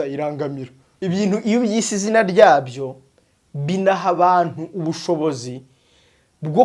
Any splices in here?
yes; 1 cut; at 0.9 s

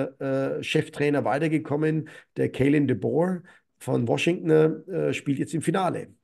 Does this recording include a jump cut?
no; 0 cuts

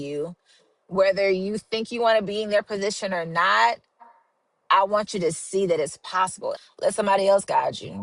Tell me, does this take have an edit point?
yes; 1 cut; at 6.6 s

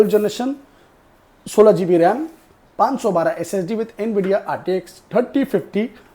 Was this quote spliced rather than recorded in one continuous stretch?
no; 0 cuts

